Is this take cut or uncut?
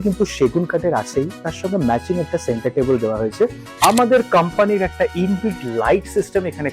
cut